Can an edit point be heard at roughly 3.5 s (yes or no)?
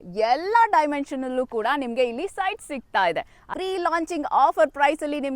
yes